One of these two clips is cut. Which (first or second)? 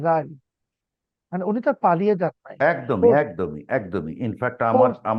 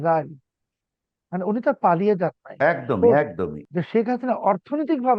second